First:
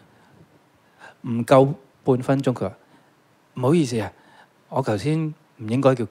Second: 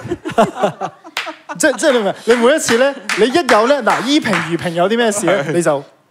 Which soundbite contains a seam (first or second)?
first